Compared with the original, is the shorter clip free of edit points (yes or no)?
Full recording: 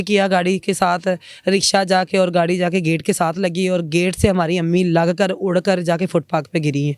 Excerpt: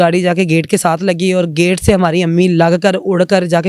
yes